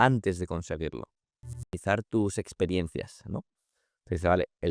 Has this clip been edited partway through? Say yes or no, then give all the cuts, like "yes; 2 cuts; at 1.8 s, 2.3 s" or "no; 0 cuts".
yes; 1 cut; at 1.6 s